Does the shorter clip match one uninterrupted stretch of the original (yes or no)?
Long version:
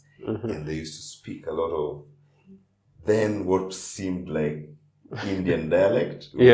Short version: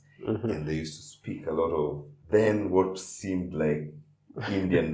no